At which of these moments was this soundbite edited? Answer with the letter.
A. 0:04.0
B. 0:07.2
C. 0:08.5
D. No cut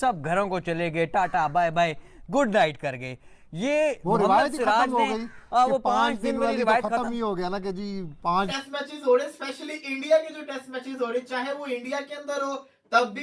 C